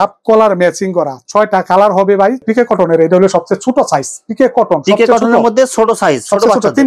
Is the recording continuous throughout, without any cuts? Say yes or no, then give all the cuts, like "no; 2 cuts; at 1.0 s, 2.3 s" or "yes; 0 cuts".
no; 1 cut; at 2.4 s